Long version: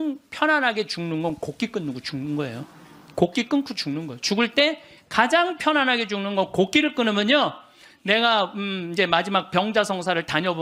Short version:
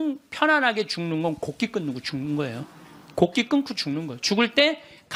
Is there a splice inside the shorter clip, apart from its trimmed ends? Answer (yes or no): no